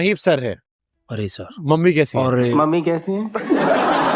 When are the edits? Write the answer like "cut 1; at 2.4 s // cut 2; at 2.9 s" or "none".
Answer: cut 1; at 2.5 s